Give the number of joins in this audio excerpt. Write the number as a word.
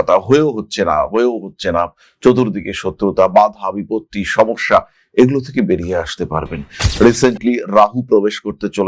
one